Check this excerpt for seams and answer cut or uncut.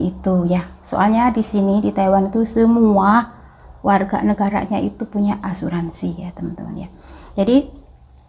uncut